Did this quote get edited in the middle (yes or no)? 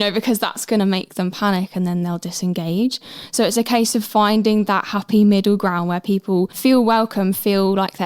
yes